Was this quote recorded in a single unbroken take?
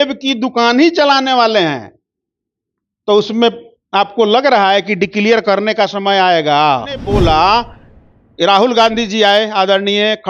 no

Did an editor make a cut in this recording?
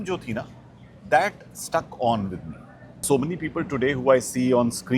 yes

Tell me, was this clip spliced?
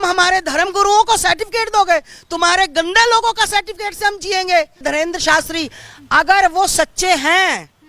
yes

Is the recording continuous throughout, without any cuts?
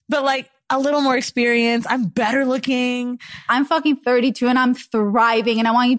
no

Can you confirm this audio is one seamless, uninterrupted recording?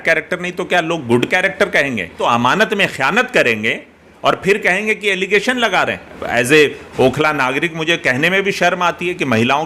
no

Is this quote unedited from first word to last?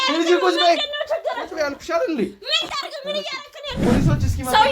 no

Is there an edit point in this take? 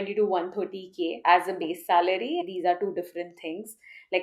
yes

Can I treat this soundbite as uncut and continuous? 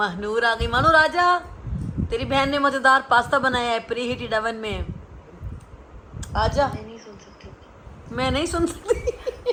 yes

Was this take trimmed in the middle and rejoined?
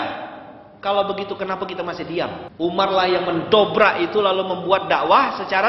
yes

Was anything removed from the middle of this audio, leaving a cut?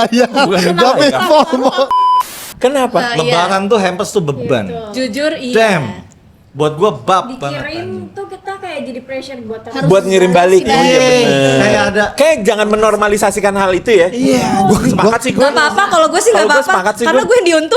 yes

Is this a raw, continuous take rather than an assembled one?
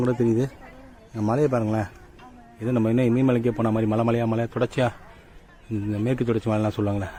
yes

